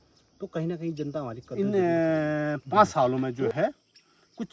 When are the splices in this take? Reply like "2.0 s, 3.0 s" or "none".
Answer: 1.5 s